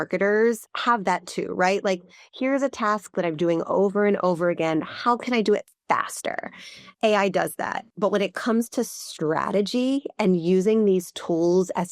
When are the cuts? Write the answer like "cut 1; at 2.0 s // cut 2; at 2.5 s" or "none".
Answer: cut 1; at 7.8 s